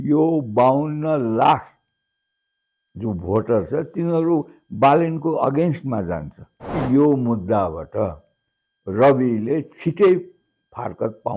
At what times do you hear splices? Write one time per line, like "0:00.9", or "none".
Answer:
0:06.8